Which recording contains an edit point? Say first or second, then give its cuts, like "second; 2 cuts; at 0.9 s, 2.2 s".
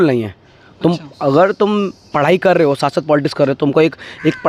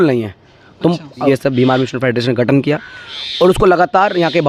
second; 1 cut; at 1.3 s